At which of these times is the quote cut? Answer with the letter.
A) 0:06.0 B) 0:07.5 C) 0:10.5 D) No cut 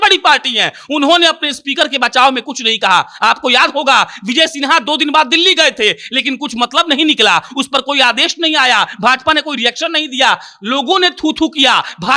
D